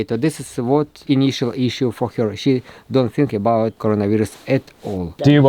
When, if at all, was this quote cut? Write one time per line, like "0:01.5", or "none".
0:01.0
0:03.8

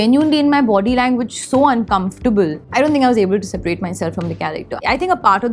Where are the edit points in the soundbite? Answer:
0:02.6
0:04.8

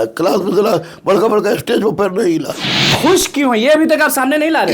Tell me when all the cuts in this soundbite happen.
0:02.7

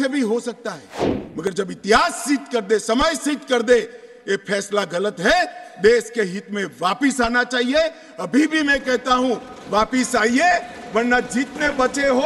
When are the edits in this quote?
none

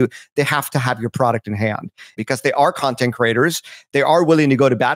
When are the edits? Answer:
0:02.2

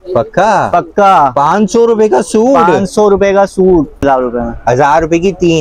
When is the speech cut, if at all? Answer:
0:04.0

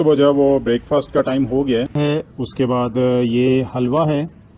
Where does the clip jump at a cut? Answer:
0:01.9

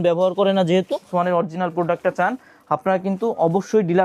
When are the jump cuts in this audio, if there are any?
0:01.1

